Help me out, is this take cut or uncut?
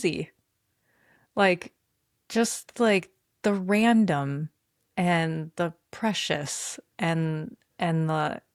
uncut